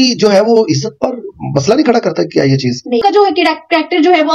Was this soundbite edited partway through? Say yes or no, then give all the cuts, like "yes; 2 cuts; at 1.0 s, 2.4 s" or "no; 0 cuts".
yes; 1 cut; at 3.0 s